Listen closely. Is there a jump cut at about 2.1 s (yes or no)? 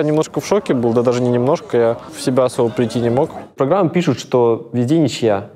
yes